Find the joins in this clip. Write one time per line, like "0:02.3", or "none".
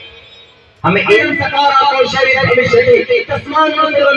0:01.2